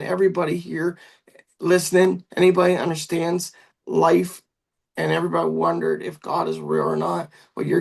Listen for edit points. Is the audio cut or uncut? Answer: uncut